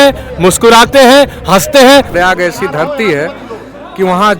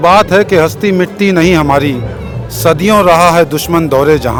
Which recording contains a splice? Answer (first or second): first